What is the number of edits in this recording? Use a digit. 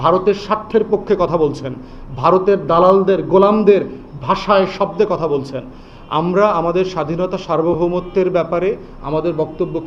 0